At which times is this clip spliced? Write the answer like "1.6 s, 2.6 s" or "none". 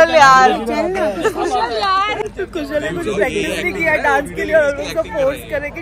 2.3 s